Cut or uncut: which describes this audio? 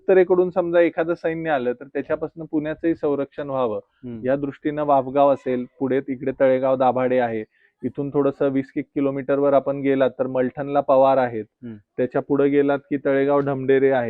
uncut